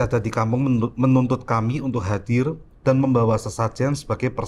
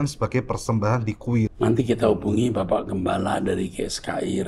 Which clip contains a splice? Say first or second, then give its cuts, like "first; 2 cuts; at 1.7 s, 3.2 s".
second; 1 cut; at 1.5 s